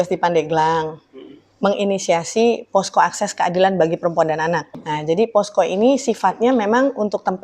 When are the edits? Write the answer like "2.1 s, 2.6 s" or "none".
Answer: 4.7 s